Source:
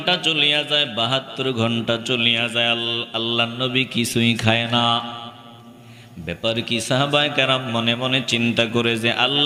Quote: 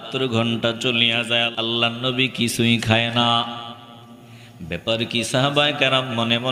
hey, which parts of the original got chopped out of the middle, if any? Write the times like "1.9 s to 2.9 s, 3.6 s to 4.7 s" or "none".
2.8 s to 3.1 s